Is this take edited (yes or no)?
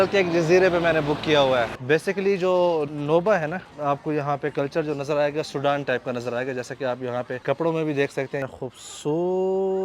yes